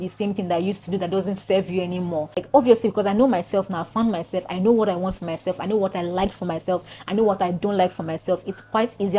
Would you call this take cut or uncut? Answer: uncut